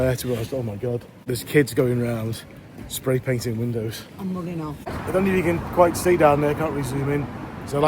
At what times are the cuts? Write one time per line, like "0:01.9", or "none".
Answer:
0:01.2
0:04.9